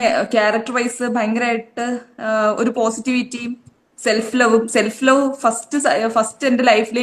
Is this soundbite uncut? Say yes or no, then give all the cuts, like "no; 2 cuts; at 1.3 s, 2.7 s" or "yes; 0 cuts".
yes; 0 cuts